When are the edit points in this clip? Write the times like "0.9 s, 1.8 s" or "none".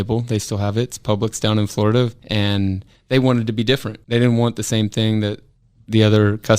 2.2 s, 3.9 s